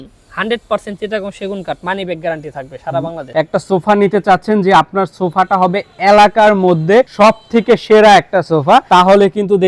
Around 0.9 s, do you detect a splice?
no; 3 cuts; at 3.2 s, 7.1 s, 8.9 s

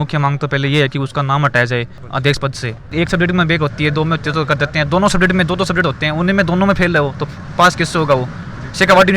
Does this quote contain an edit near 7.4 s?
no; 1 cut; at 2.9 s

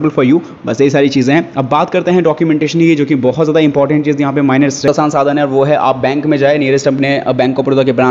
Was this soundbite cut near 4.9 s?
yes; 1 cut; at 4.9 s

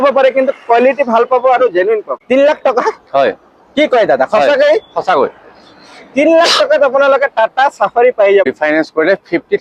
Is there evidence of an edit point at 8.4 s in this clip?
yes; 2 cuts; at 2.2 s, 8.4 s

